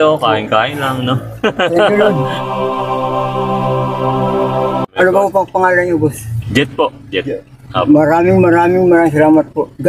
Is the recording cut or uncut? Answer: uncut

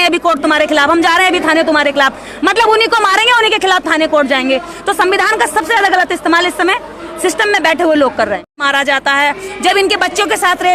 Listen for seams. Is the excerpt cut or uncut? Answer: cut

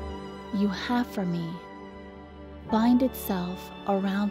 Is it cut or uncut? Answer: uncut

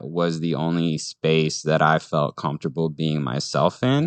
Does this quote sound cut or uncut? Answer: uncut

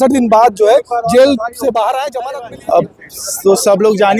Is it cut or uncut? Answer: cut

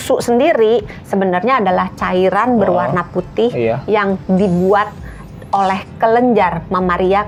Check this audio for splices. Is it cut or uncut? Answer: uncut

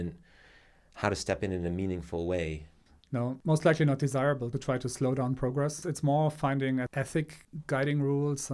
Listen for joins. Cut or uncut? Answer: cut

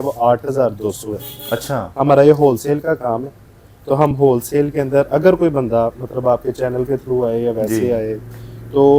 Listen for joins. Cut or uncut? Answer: uncut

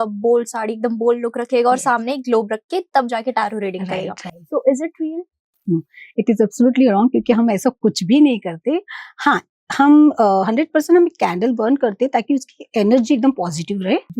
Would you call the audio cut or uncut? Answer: uncut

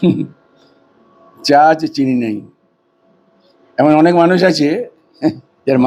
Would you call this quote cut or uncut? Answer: uncut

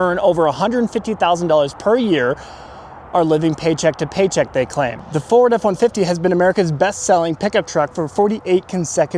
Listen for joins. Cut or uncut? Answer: cut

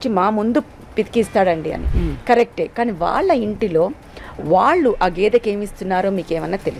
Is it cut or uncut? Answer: uncut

